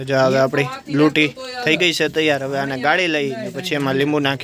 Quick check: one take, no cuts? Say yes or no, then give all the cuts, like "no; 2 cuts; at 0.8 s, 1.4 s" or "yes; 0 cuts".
yes; 0 cuts